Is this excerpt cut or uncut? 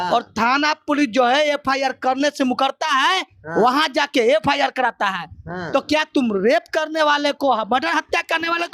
uncut